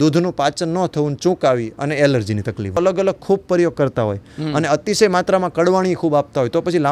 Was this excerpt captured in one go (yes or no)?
no